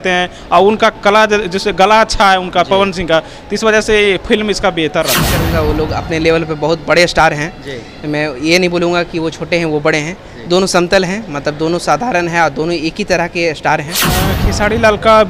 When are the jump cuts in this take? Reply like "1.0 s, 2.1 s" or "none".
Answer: 5.5 s, 14.3 s